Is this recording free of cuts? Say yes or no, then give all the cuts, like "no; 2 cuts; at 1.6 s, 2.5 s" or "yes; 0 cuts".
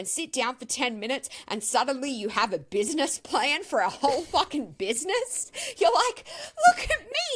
yes; 0 cuts